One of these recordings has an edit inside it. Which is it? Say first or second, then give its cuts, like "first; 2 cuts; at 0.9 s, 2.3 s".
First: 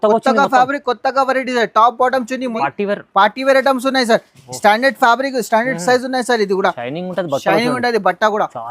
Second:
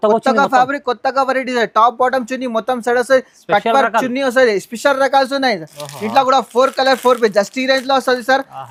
first; 1 cut; at 2.6 s